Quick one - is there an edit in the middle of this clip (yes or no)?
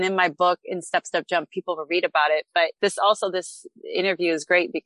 yes